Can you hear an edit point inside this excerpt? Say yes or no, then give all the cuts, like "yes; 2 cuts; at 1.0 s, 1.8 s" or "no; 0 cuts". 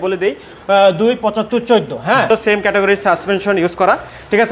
yes; 1 cut; at 2.3 s